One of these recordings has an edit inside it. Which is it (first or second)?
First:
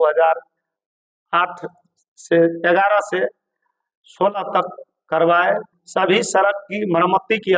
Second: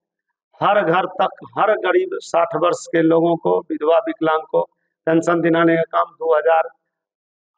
first